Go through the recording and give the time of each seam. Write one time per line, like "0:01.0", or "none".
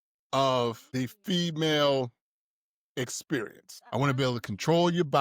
0:00.8
0:03.7